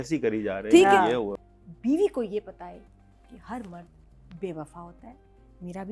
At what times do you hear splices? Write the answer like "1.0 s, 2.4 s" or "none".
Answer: 1.3 s